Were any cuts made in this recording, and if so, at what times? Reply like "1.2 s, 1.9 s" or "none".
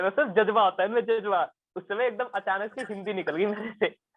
none